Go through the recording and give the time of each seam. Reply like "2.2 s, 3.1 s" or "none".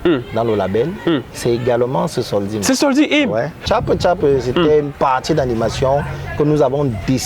3.6 s